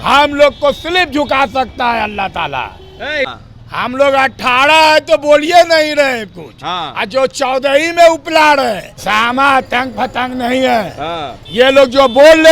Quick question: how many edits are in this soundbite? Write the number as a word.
two